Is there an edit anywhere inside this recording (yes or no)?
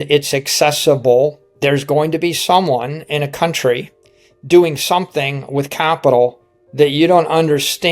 yes